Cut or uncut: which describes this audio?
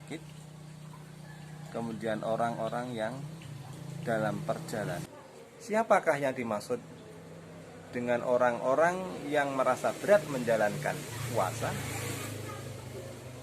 cut